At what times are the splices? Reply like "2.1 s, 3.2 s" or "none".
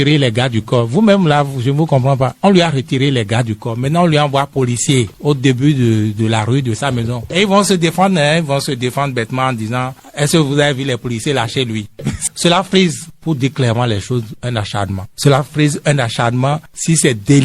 12.2 s